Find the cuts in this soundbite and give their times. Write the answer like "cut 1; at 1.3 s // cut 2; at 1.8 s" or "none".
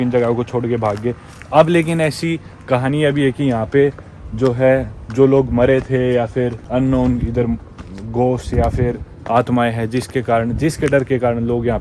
none